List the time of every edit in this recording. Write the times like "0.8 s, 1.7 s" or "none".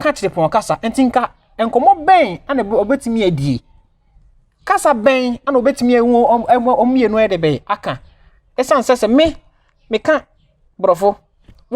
none